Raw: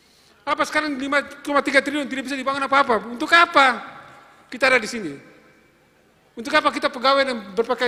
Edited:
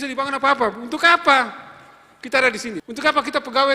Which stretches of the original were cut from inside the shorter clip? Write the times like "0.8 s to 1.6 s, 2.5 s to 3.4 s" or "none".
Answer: 5.1 s to 6.3 s